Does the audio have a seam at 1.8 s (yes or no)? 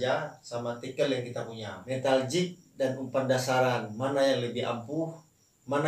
yes